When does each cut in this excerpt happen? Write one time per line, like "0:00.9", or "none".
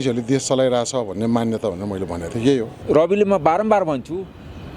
0:02.7